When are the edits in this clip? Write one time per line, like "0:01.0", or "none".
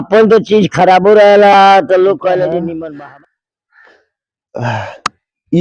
0:02.8

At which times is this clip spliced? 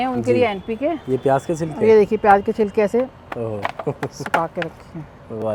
none

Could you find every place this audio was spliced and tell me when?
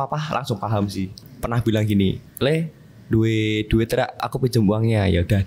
0:01.3
0:04.2

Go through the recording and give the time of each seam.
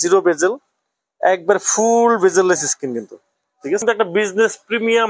0:03.8

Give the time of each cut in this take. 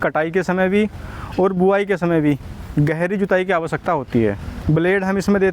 0:04.5

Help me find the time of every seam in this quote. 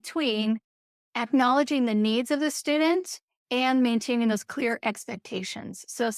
none

